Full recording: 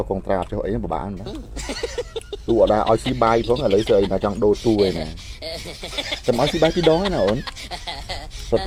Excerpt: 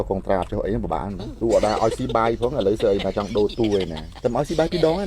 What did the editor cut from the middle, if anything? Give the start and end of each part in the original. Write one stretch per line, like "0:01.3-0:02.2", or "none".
0:01.2-0:02.3
0:05.1-0:06.1